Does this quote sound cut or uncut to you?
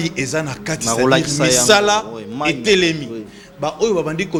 uncut